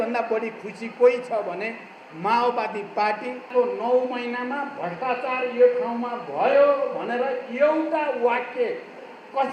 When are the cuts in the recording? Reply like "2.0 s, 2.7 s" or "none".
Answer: 3.5 s

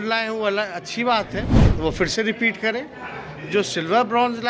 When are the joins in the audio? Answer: none

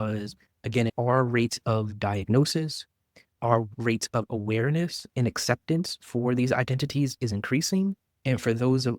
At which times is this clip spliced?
0.9 s

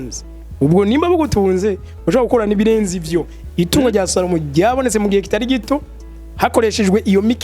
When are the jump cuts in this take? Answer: 3.4 s

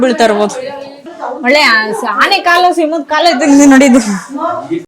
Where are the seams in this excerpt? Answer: 1.2 s

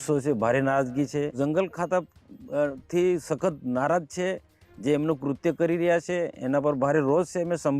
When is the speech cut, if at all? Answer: 1.3 s

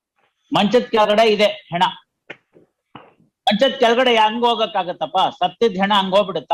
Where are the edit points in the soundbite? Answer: none

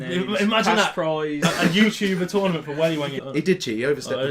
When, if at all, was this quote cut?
3.2 s

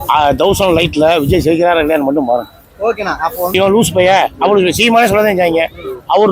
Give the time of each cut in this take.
3.5 s

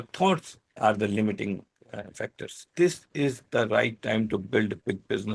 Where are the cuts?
2.6 s

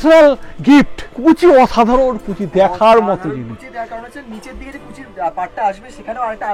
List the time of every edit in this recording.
1.0 s

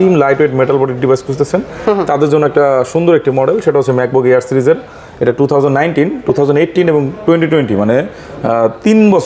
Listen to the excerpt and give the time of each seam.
none

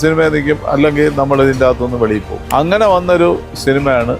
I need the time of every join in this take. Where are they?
2.3 s

